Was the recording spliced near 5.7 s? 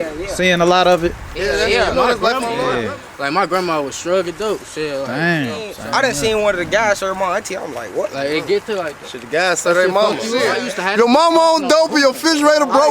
yes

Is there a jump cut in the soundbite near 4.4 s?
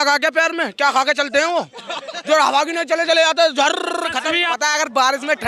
yes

